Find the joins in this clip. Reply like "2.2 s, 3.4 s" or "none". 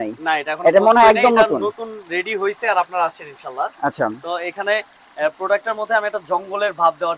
none